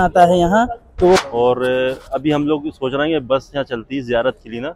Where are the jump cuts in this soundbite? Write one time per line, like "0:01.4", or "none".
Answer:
0:01.2